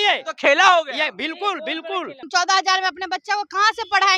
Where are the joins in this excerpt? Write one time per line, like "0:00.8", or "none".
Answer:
0:02.3